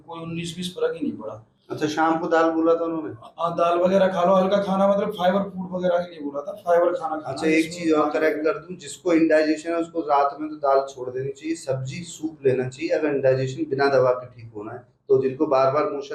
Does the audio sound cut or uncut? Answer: uncut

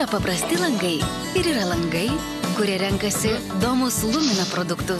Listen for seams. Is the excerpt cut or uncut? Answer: uncut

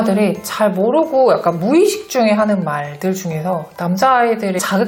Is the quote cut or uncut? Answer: uncut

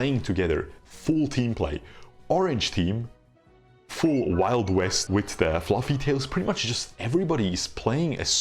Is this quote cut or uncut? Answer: cut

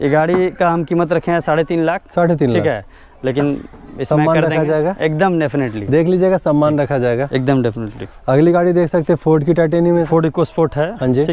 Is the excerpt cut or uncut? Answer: uncut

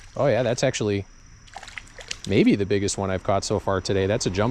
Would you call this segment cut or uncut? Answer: uncut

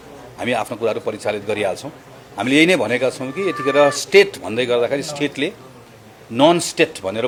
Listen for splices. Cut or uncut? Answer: uncut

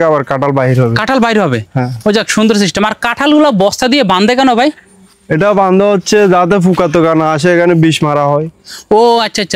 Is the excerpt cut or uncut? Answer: uncut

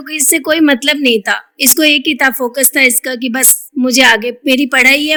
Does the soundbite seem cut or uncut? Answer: uncut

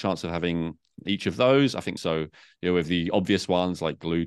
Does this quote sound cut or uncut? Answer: cut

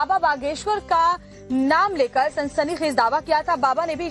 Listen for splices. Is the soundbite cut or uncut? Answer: uncut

